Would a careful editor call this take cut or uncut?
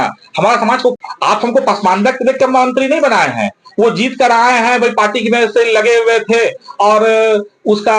cut